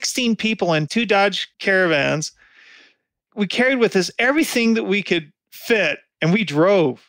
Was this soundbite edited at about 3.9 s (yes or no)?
no